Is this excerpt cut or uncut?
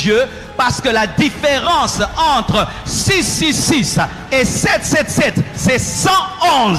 uncut